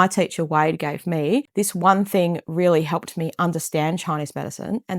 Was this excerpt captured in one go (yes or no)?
no